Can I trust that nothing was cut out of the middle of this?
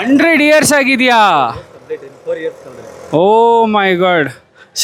yes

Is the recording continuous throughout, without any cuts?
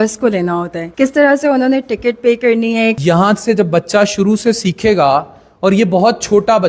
no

